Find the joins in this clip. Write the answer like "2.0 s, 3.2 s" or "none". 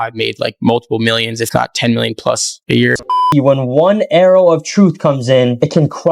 3.2 s